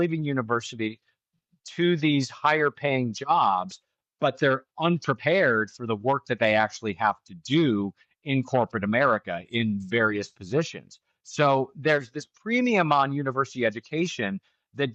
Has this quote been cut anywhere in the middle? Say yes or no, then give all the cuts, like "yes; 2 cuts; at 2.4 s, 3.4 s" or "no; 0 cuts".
no; 0 cuts